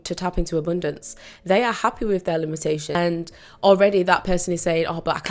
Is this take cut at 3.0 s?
yes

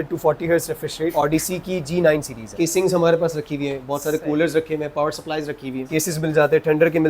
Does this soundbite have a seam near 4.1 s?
no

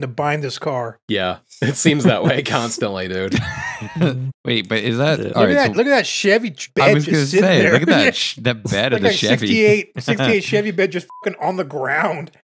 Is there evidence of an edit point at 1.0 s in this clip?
no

